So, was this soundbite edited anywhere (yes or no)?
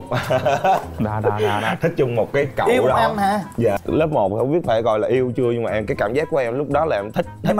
yes